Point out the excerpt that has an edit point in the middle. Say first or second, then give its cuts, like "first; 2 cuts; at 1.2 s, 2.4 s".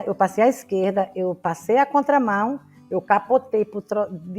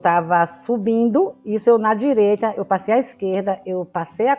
second; 1 cut; at 1.4 s